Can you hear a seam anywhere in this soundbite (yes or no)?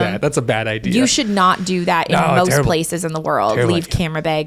no